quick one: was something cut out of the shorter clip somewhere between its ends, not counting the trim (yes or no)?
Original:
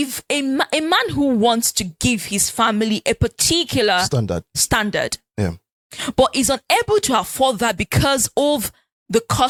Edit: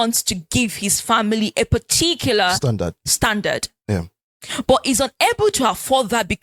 no